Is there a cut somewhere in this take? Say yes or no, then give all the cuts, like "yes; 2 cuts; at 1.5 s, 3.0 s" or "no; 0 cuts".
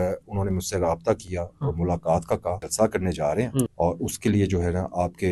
yes; 2 cuts; at 2.6 s, 3.7 s